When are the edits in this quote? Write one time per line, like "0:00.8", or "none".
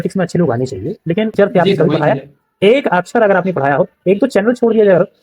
0:01.3